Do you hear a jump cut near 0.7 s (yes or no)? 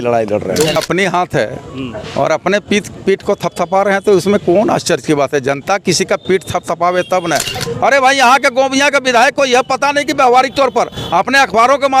yes